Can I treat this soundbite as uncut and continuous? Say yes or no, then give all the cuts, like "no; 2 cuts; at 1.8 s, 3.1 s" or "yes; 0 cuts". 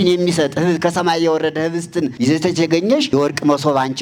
no; 2 cuts; at 2.1 s, 3.1 s